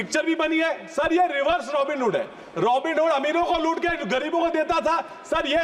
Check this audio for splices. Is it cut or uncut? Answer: uncut